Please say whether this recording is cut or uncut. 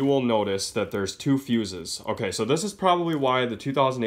uncut